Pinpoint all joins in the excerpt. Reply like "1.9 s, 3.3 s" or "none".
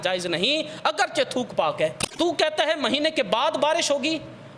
2.0 s